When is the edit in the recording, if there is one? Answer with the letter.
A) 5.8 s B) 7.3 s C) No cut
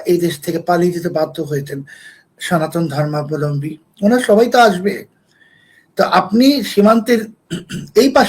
C